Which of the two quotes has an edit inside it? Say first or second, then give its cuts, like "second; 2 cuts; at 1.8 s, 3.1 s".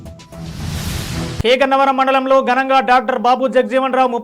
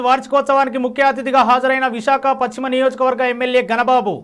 first; 1 cut; at 1.4 s